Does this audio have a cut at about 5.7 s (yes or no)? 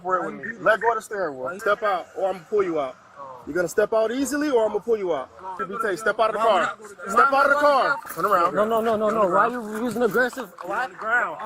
yes